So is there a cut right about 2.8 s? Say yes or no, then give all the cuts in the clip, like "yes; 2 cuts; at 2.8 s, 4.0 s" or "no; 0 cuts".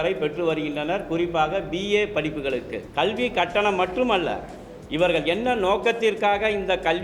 yes; 1 cut; at 2.8 s